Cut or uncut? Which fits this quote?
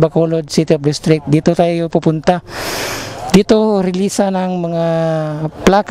uncut